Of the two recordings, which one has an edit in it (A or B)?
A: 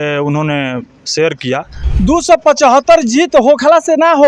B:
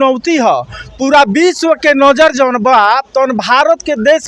A